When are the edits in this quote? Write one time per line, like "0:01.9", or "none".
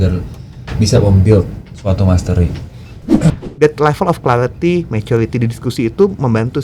0:03.3